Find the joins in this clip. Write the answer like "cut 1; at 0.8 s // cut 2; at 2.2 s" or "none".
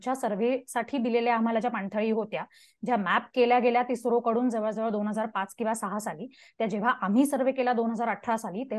none